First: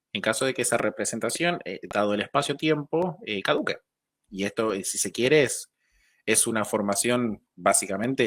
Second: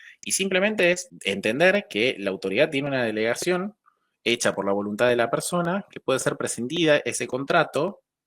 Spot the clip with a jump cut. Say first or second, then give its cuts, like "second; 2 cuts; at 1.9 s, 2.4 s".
second; 1 cut; at 1.1 s